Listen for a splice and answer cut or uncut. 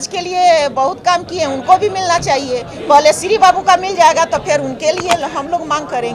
uncut